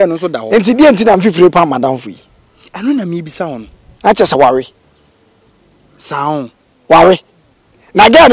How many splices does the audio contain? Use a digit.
1